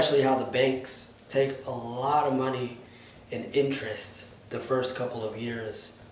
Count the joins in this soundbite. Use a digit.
0